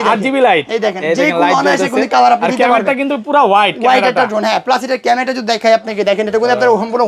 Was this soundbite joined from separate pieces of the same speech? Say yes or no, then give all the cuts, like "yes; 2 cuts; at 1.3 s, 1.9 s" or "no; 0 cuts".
no; 0 cuts